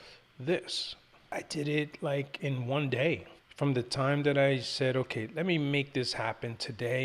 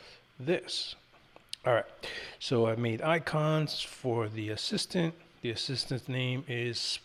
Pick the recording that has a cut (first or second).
first